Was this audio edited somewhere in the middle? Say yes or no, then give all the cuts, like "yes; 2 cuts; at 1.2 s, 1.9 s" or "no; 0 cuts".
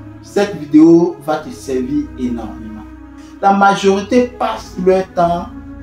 yes; 1 cut; at 3.2 s